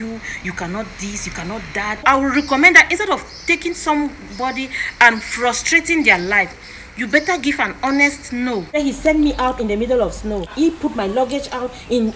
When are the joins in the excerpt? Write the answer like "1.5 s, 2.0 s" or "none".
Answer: 2.0 s, 8.8 s, 10.5 s